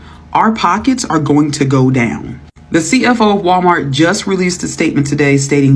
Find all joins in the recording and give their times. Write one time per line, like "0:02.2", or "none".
none

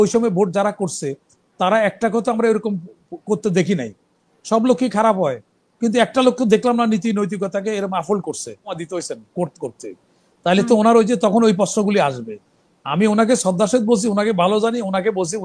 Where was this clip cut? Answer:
0:08.8

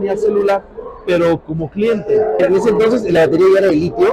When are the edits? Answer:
0:02.4

